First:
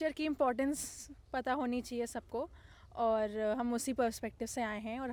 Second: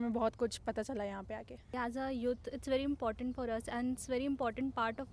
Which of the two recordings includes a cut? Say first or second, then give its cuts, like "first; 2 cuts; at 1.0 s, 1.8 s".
second; 1 cut; at 1.7 s